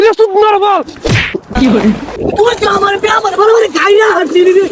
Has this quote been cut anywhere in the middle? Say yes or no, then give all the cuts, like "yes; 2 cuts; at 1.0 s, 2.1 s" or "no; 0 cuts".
yes; 1 cut; at 2.1 s